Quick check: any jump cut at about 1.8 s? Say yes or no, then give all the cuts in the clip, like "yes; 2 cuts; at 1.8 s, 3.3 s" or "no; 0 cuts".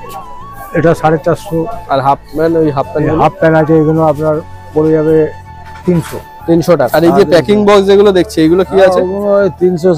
no; 1 cut; at 6.9 s